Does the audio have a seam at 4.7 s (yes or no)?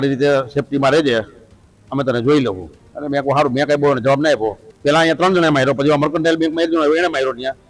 yes